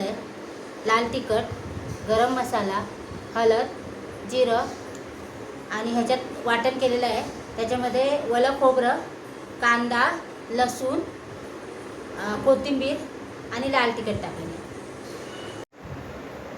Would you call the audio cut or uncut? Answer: cut